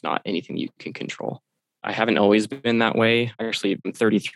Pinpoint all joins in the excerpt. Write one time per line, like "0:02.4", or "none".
0:01.9
0:03.4